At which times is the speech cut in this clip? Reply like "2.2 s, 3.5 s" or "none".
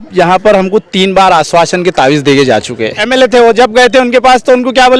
3.0 s